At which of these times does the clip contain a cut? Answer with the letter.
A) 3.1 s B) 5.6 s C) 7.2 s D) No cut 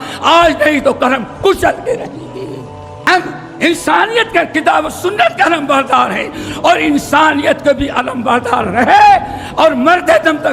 A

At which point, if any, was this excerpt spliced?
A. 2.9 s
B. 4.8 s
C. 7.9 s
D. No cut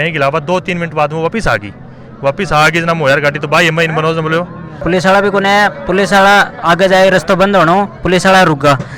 B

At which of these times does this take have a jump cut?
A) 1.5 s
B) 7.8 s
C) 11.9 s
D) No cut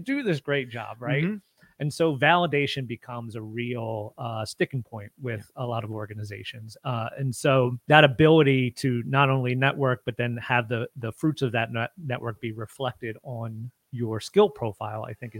B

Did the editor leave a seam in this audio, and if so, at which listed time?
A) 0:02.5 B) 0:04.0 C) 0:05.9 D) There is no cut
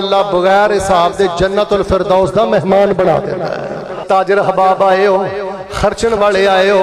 B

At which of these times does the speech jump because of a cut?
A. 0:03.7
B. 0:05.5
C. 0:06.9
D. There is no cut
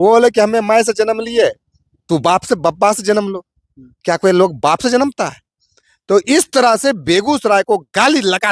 D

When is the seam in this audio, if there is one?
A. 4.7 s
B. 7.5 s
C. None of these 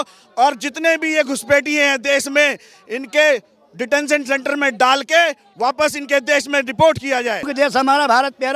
B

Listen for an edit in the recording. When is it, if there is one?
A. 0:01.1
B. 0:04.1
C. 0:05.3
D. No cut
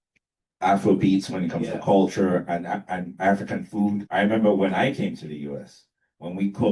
B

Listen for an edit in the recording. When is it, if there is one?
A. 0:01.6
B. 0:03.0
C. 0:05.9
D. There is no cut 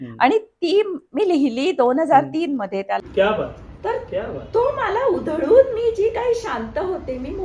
B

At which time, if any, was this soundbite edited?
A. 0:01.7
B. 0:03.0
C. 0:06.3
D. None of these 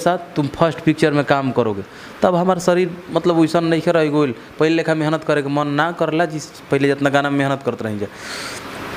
D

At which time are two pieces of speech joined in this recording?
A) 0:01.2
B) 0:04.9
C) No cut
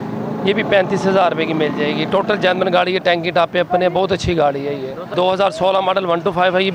B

